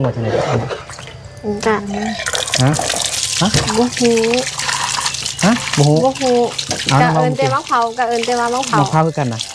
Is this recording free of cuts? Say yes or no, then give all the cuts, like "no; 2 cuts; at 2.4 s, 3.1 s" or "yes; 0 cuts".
yes; 0 cuts